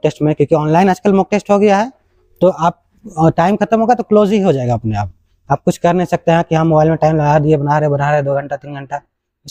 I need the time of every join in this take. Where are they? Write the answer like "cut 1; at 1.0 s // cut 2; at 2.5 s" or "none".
none